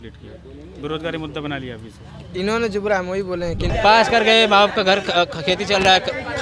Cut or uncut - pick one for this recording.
cut